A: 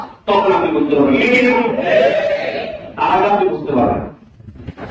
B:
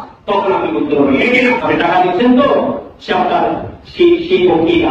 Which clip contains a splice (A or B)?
B